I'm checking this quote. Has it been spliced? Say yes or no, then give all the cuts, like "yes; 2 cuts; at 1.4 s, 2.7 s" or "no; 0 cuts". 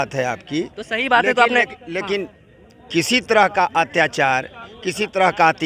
no; 0 cuts